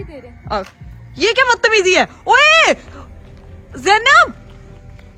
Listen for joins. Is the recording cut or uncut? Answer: uncut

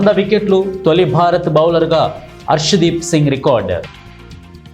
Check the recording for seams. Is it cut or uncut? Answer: cut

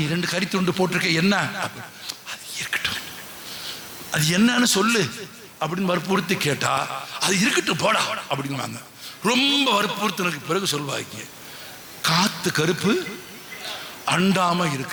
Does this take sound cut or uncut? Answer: uncut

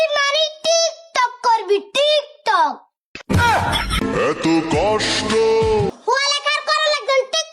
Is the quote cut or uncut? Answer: cut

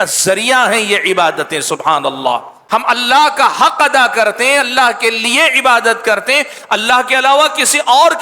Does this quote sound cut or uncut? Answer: cut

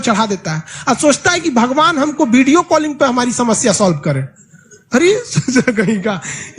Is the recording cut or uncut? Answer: uncut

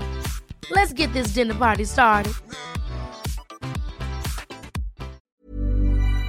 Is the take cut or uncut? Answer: cut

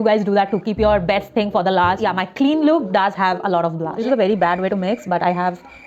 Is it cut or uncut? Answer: cut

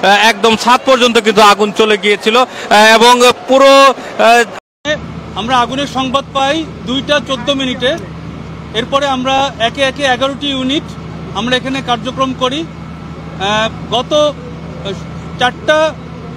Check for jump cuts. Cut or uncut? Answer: cut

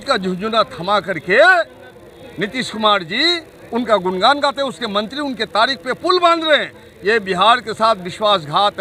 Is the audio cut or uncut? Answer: uncut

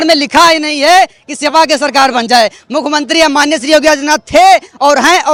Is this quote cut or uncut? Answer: uncut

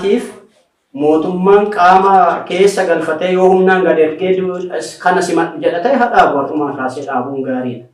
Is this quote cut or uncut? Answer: uncut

